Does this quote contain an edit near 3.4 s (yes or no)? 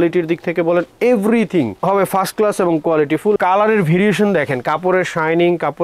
yes